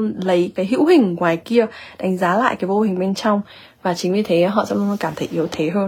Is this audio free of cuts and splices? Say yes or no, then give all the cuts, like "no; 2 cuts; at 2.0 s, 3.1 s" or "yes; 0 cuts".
yes; 0 cuts